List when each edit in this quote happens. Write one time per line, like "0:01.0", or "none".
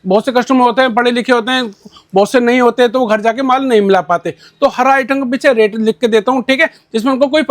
none